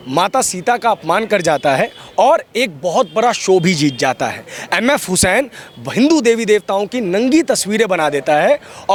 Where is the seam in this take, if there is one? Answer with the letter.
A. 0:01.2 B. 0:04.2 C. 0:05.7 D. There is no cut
D